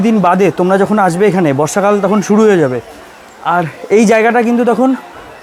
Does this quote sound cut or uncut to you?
uncut